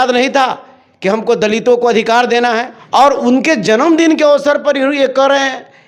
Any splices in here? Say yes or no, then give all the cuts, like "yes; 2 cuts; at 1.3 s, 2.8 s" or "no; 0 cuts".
yes; 1 cut; at 2.7 s